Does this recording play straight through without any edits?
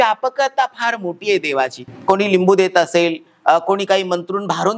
no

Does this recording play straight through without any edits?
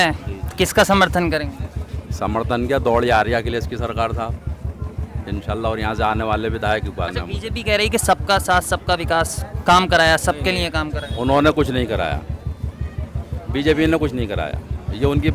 yes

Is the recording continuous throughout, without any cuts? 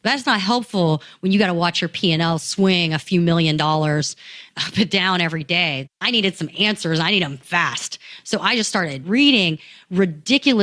no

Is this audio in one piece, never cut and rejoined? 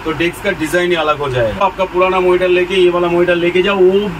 no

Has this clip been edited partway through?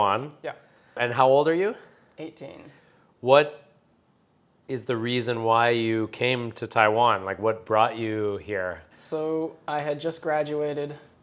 no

